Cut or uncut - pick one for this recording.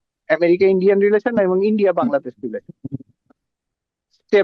uncut